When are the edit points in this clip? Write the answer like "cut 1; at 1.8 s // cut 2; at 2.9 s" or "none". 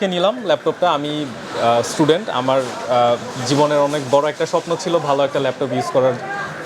none